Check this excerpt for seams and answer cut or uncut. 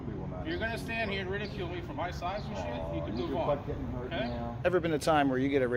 cut